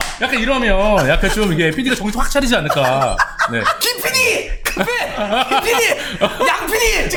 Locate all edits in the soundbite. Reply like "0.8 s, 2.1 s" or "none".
none

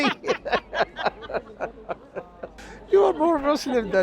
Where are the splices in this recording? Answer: 2.7 s

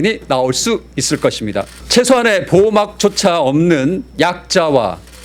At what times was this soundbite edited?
1.8 s, 4.1 s

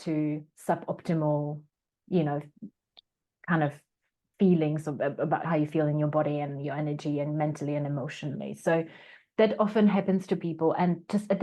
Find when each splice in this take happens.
5.4 s

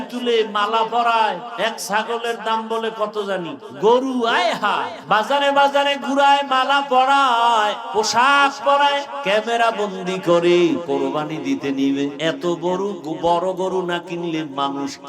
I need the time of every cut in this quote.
1.5 s, 3.6 s, 5.0 s, 7.8 s, 9.1 s, 10.8 s, 12.2 s

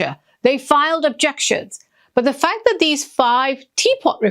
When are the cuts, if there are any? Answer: 1.8 s

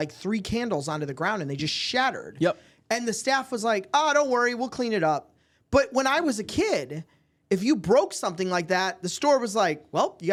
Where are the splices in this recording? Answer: none

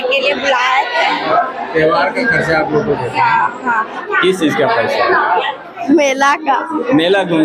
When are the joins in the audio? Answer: 1.3 s, 4.0 s

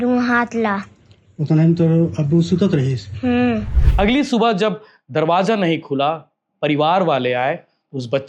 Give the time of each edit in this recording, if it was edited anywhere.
3.7 s

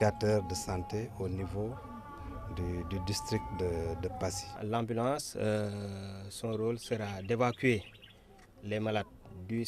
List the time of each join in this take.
4.5 s

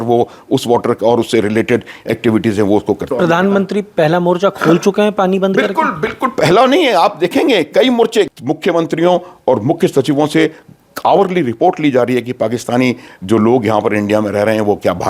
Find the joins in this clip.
3.1 s, 8.3 s

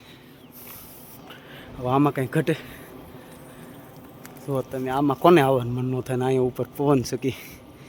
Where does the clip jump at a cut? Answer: none

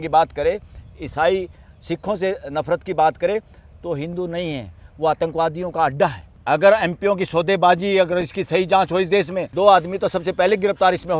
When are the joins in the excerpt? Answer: 6.3 s, 9.4 s

